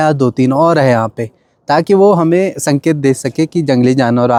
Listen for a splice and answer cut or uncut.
uncut